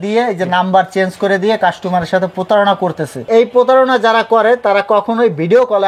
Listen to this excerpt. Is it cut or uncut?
uncut